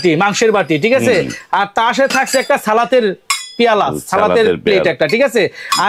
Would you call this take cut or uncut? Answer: uncut